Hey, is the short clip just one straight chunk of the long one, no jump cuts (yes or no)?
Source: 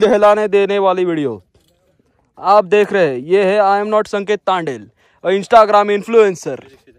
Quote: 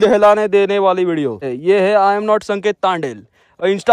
no